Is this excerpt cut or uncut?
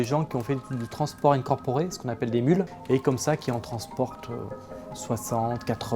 cut